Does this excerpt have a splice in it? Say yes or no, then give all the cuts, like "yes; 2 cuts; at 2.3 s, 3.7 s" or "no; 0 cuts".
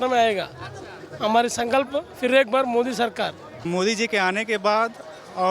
yes; 1 cut; at 3.6 s